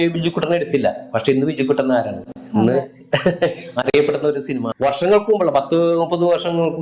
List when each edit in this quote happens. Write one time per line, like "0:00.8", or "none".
0:04.7